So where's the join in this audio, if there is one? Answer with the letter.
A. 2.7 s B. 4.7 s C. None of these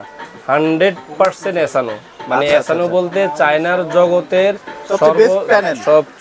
C